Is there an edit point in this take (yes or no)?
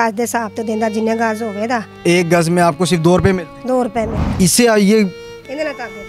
yes